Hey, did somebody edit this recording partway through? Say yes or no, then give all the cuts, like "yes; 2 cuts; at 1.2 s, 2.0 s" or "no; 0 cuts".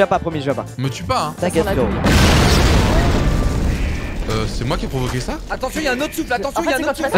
no; 0 cuts